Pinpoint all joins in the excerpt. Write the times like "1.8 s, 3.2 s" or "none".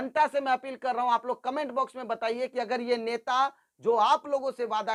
none